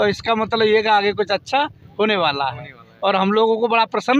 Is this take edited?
no; 0 cuts

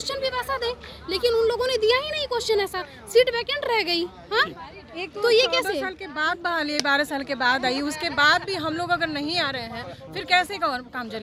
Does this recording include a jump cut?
no; 0 cuts

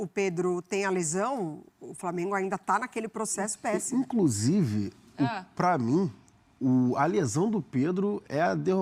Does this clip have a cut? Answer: no; 0 cuts

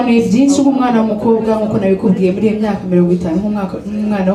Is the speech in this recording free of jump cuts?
yes; 0 cuts

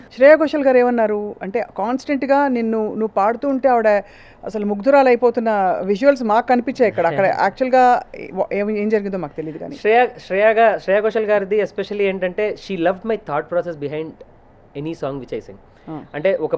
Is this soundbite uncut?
yes; 0 cuts

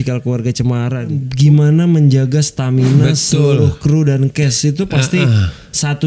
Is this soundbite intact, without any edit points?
no; 1 cut; at 1.2 s

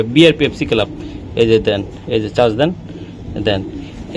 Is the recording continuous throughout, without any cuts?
yes; 0 cuts

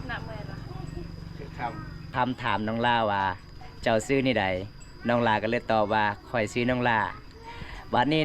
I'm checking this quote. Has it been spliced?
yes; 1 cut; at 2.1 s

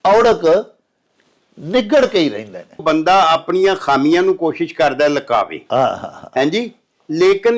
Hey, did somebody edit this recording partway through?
yes; 1 cut; at 2.8 s

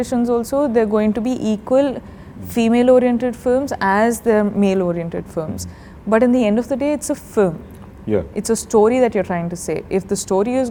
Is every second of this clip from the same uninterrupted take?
yes; 0 cuts

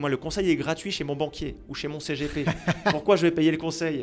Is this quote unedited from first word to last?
yes; 0 cuts

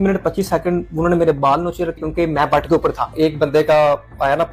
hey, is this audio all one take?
no; 2 cuts; at 2.0 s, 3.1 s

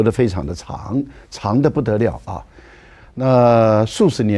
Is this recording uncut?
yes; 0 cuts

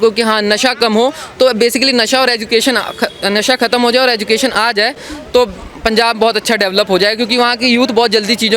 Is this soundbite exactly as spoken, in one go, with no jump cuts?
yes; 0 cuts

